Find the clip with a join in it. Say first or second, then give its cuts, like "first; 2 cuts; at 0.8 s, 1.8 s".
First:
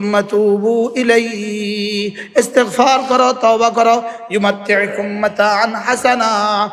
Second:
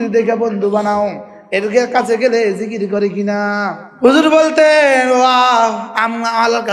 second; 1 cut; at 3.9 s